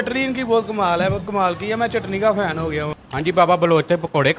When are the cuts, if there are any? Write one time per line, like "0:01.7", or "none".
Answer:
0:03.0